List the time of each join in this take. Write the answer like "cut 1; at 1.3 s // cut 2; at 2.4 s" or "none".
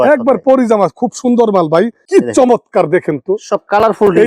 cut 1; at 2.0 s